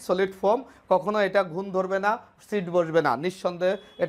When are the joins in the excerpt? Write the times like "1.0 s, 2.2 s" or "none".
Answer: none